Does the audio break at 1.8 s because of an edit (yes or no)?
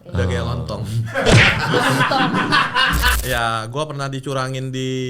no